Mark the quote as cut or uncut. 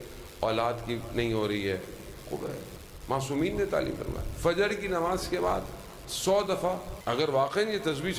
cut